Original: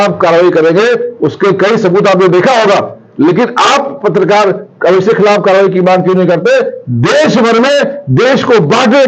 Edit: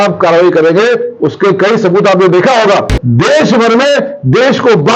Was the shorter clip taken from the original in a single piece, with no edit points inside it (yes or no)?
no